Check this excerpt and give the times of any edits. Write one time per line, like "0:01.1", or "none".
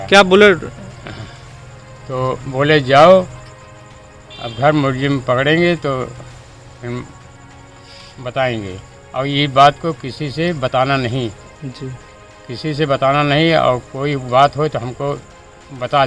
none